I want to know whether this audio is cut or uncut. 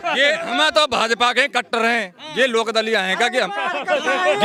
uncut